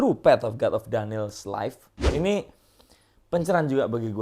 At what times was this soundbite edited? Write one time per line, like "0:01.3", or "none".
0:02.1